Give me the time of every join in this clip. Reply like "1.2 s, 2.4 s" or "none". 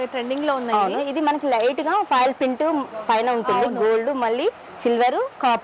none